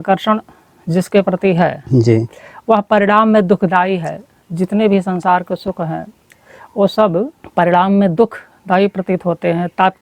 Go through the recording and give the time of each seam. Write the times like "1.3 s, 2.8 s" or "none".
7.4 s